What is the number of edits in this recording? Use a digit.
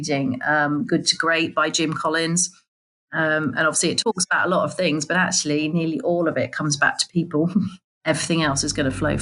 1